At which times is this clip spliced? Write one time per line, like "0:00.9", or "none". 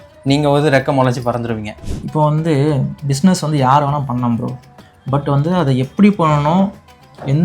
0:01.8